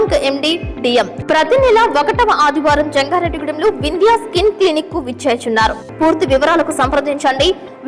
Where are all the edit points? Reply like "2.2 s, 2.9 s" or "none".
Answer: 1.2 s, 5.8 s